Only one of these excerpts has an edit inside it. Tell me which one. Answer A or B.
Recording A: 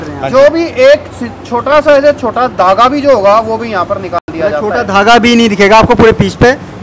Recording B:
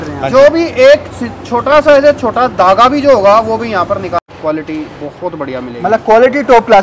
B